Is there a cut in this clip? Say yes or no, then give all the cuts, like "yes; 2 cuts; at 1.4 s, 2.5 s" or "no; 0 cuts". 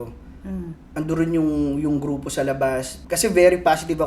yes; 1 cut; at 2.9 s